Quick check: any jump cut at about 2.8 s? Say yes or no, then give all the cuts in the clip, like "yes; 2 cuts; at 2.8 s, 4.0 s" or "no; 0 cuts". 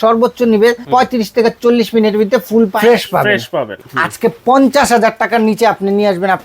yes; 3 cuts; at 0.8 s, 2.8 s, 3.7 s